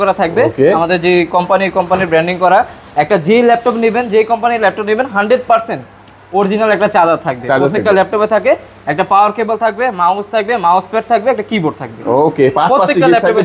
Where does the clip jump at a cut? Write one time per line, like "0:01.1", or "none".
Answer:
none